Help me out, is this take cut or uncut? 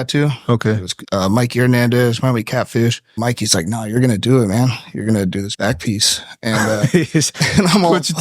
cut